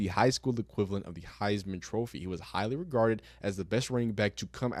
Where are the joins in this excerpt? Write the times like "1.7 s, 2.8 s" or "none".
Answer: none